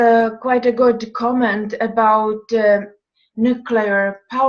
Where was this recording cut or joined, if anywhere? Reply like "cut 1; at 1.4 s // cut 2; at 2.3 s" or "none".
cut 1; at 2.5 s